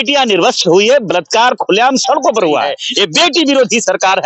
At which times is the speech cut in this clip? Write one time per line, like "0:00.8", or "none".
0:02.8